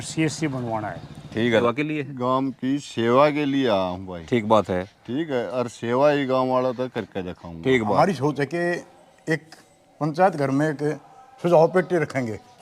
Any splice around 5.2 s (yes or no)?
no